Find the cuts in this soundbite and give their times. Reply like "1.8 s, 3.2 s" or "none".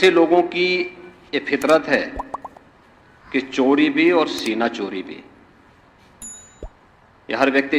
none